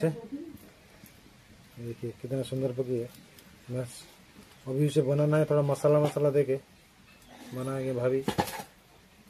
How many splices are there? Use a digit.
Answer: 0